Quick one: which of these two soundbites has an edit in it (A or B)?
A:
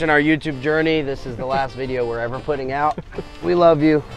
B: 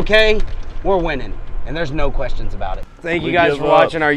B